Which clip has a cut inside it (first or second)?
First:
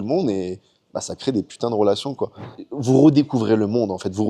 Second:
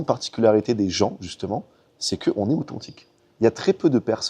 first